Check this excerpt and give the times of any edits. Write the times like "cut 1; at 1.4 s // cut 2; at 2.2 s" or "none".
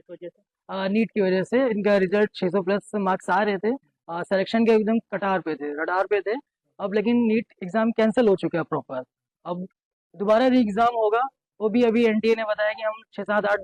none